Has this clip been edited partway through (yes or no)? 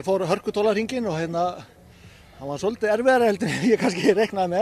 no